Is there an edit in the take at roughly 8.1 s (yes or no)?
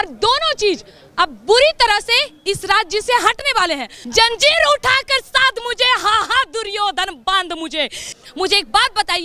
yes